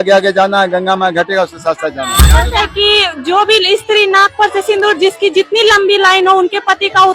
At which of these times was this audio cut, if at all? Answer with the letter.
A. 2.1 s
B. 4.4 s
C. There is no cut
A